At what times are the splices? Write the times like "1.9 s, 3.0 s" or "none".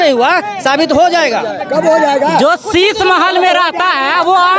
none